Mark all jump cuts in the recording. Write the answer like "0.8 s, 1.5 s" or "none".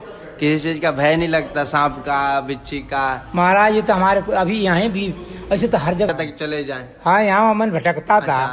6.1 s

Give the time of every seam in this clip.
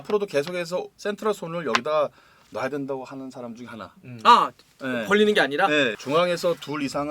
0.9 s, 5.9 s

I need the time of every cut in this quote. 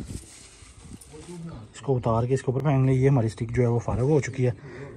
none

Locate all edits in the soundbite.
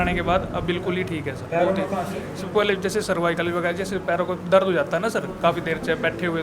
none

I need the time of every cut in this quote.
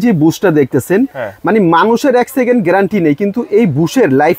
none

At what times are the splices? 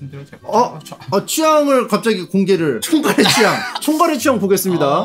2.8 s, 3.8 s

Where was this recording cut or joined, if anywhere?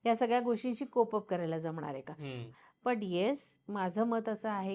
2.5 s

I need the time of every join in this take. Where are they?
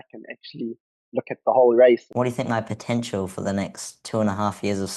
2.1 s

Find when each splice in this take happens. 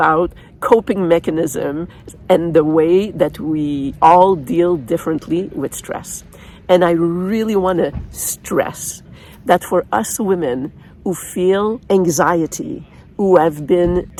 none

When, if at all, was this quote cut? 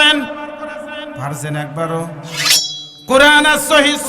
2.6 s

